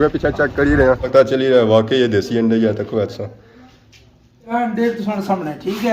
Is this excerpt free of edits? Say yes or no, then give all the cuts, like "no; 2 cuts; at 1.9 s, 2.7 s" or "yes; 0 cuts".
no; 2 cuts; at 1.0 s, 4.5 s